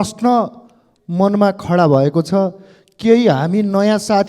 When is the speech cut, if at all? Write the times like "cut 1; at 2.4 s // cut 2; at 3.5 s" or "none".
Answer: none